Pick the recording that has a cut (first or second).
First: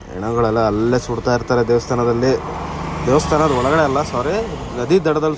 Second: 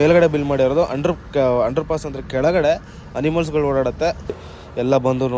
second